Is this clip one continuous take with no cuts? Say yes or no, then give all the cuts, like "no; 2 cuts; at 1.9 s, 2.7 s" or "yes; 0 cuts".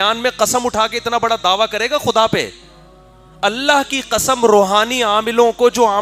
yes; 0 cuts